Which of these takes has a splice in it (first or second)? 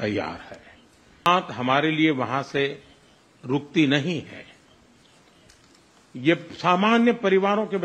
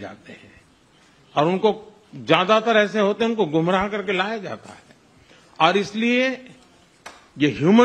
first